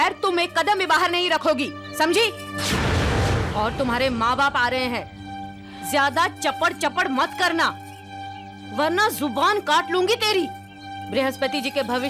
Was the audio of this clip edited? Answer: no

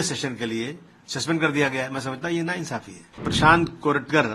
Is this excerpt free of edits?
no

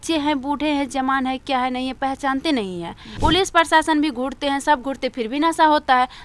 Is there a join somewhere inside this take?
yes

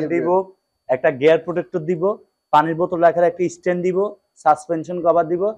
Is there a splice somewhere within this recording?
no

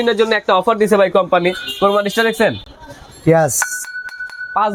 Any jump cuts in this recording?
no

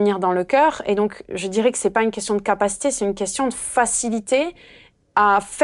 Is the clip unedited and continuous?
yes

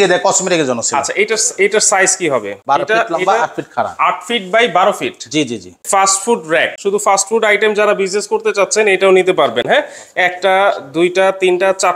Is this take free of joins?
no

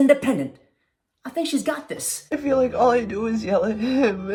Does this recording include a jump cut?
no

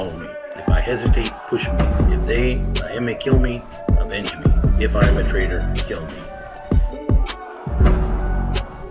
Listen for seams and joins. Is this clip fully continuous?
no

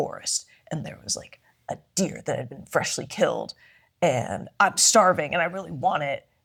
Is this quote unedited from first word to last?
yes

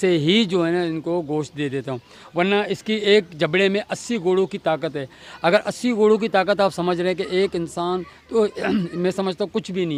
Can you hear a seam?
no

